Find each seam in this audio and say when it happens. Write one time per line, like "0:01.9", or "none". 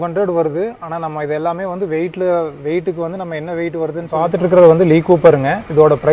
0:04.3